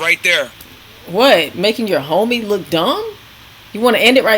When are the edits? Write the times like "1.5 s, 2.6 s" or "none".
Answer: 1.5 s